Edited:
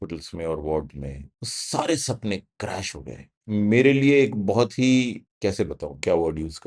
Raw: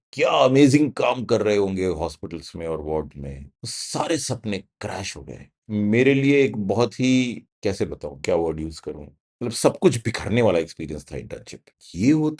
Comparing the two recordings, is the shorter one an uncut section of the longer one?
yes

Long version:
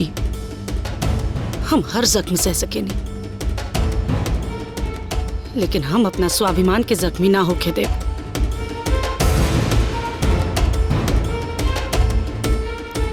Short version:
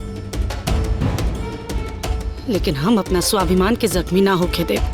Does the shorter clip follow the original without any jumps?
yes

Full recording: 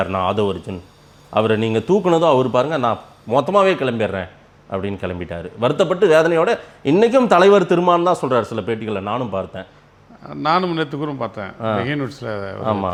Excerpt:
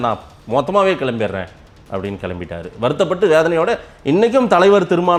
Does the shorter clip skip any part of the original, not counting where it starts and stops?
no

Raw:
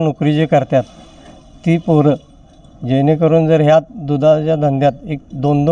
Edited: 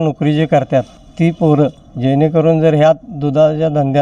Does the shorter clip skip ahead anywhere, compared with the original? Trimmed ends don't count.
yes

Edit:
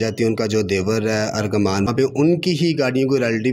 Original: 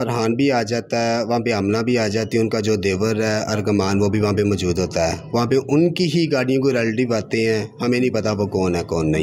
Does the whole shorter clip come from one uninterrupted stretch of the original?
no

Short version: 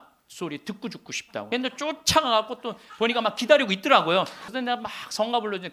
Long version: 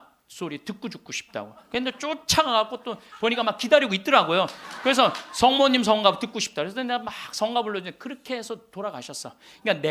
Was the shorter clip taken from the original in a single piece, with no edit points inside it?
no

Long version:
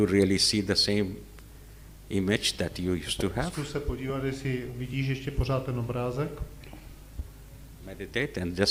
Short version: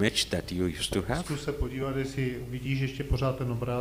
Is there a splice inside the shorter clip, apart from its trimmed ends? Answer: no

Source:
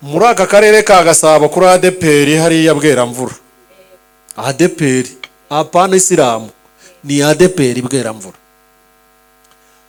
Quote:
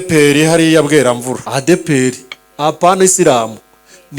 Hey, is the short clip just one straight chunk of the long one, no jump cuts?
no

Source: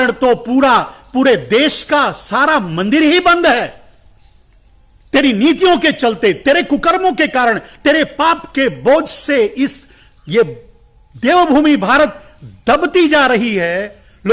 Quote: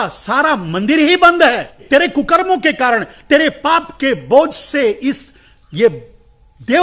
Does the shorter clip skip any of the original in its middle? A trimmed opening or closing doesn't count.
yes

